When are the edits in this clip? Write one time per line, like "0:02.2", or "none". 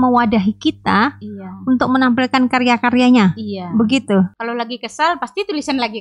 0:04.4